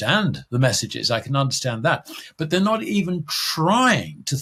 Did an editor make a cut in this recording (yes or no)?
no